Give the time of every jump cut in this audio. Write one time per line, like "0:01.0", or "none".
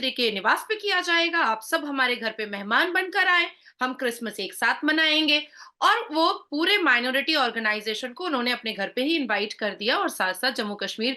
none